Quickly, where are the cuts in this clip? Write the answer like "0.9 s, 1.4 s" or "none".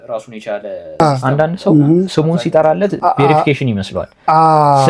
2.1 s